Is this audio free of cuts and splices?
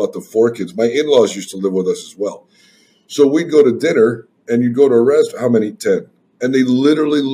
yes; 0 cuts

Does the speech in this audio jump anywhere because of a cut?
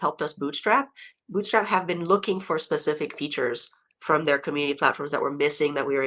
no; 0 cuts

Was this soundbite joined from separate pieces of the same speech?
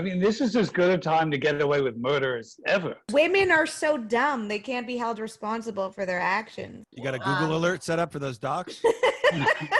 yes; 2 cuts; at 3.1 s, 6.8 s

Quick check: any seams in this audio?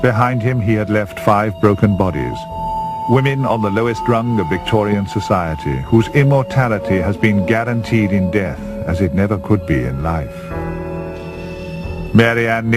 no; 0 cuts

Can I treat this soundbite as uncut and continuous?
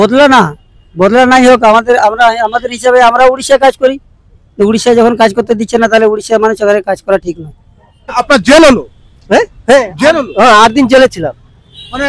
no; 1 cut; at 8.2 s

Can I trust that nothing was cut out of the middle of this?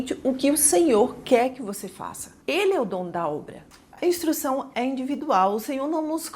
no; 2 cuts; at 2.3 s, 3.6 s

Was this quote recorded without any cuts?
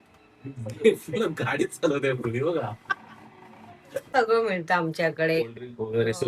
no; 1 cut; at 4.1 s

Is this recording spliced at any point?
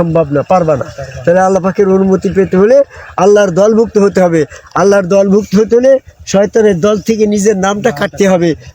no; 0 cuts

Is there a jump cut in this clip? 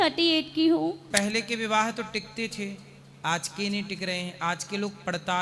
yes; 1 cut; at 1.1 s

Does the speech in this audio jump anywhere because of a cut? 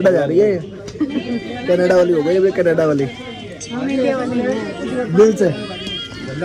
no; 0 cuts

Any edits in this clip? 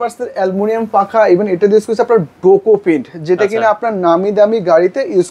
no; 0 cuts

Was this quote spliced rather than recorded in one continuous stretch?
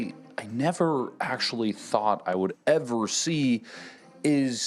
no; 0 cuts

